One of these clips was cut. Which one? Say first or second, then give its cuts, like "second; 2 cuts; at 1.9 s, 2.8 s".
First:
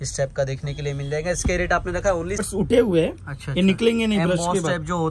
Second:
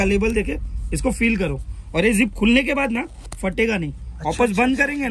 first; 1 cut; at 2.4 s